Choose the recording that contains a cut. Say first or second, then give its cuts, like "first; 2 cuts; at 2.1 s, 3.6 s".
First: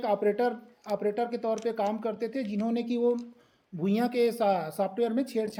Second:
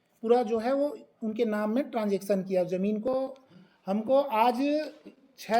second; 1 cut; at 3.1 s